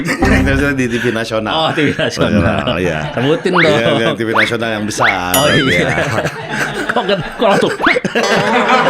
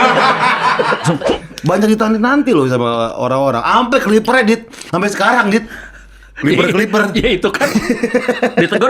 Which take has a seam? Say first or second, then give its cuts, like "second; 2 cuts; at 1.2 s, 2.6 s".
second; 1 cut; at 1.3 s